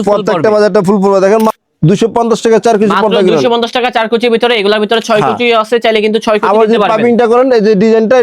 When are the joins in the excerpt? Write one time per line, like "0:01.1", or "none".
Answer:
0:01.6